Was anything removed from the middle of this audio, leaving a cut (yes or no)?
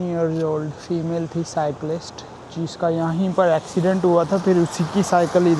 no